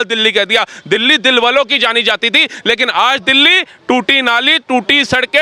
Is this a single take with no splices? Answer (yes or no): yes